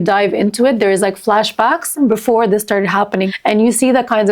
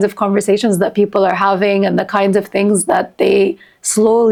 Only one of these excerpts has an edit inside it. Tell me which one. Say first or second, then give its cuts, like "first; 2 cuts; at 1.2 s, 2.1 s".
first; 2 cuts; at 2.0 s, 3.3 s